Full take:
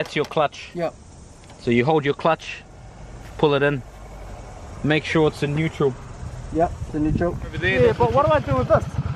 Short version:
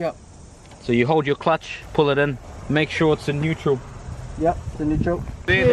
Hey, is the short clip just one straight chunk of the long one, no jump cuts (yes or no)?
no